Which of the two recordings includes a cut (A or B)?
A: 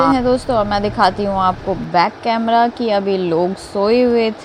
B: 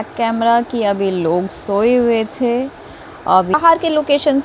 B